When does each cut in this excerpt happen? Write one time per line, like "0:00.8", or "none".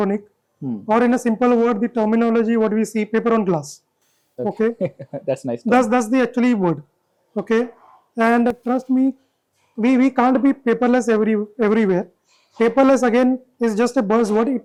none